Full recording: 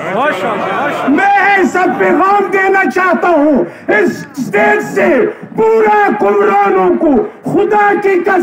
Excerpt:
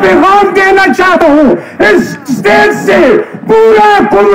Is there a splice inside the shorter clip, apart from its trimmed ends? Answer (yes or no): yes